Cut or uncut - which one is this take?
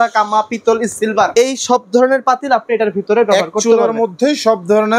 uncut